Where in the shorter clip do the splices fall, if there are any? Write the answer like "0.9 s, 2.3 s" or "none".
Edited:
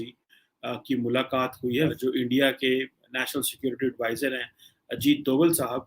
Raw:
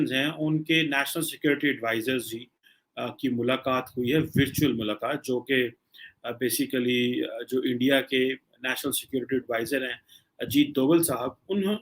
1.9 s